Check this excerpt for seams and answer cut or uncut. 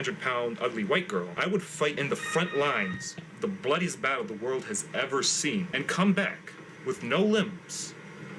cut